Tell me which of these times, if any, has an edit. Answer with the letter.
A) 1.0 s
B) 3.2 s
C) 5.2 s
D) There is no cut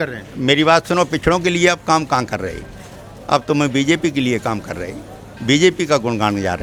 D